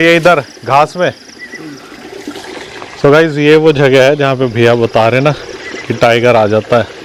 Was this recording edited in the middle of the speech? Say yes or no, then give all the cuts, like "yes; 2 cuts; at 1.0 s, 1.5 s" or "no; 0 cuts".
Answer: no; 0 cuts